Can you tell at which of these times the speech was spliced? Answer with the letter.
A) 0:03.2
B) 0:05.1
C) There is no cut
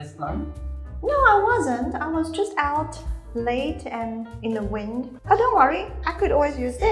B